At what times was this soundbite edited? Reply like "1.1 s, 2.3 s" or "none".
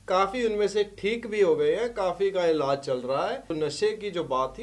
3.5 s